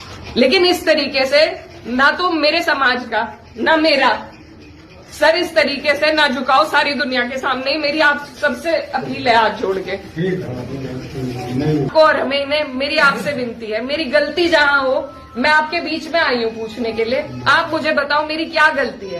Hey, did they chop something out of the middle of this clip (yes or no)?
yes